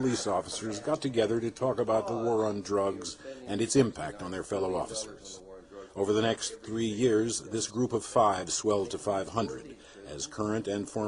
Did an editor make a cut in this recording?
yes; 1 cut; at 8.5 s

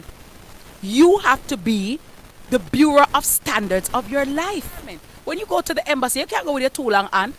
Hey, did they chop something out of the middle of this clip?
yes; 1 cut; at 5.1 s

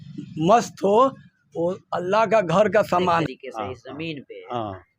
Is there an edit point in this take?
yes; 1 cut; at 3.2 s

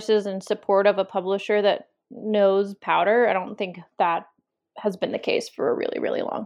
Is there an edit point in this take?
no; 0 cuts

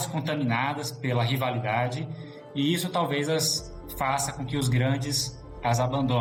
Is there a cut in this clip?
no; 0 cuts

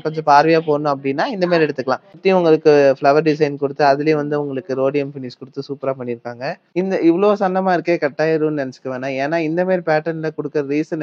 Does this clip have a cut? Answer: yes; 2 cuts; at 2.2 s, 6.7 s

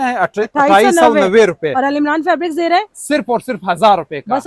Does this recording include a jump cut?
no; 0 cuts

